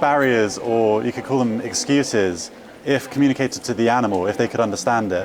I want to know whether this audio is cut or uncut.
uncut